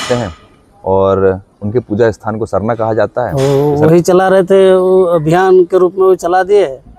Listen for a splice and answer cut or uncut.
cut